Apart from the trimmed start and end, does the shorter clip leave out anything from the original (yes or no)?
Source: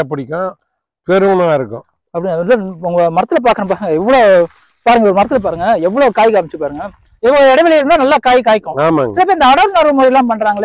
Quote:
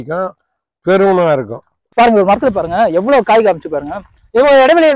yes